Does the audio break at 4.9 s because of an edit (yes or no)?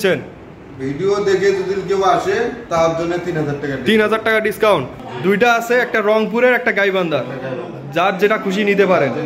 yes